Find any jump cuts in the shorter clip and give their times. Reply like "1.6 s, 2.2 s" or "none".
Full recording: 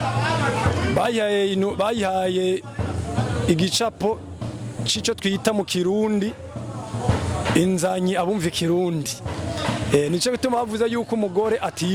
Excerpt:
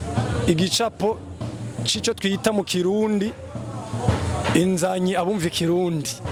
none

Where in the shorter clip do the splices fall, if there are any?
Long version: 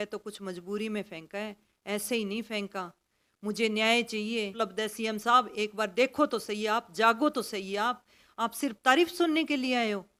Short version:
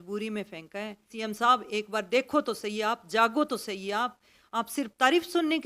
1.1 s

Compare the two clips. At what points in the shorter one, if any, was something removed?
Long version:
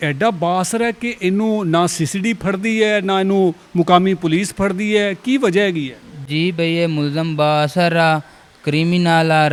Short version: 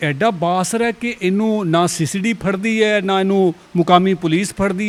none

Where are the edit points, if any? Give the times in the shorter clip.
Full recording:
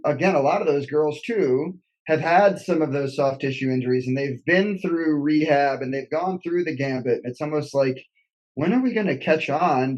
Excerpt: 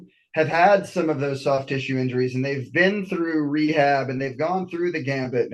none

